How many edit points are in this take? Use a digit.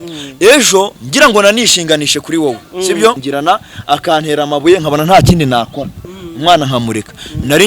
1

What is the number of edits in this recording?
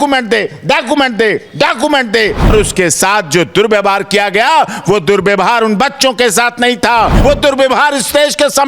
2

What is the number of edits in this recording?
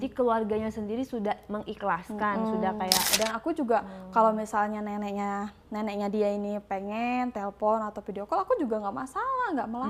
1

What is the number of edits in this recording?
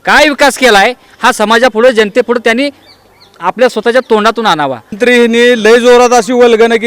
1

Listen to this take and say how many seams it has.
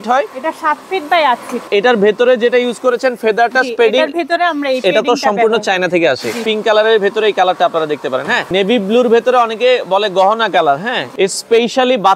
4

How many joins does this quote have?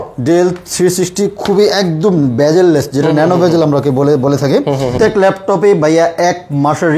1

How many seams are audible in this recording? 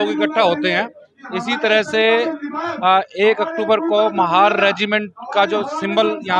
0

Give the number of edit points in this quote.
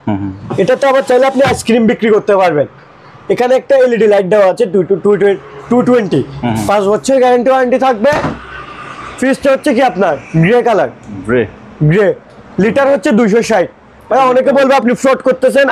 0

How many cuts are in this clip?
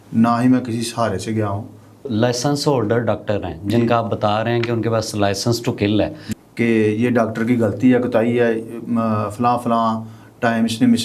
2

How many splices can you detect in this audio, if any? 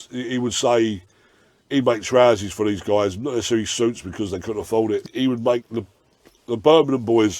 1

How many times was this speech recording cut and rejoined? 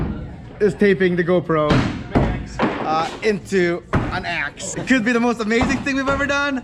1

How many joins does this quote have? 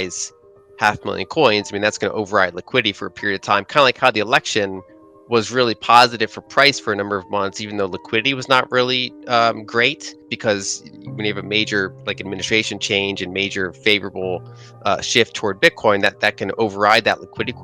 0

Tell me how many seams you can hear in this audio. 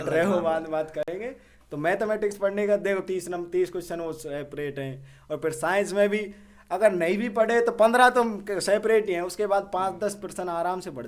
0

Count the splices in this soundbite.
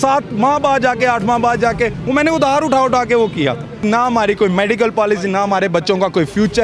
1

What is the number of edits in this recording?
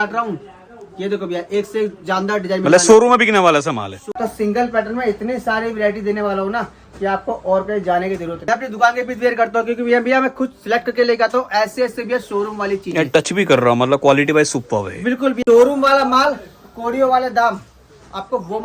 3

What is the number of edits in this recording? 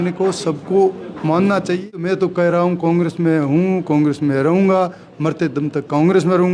1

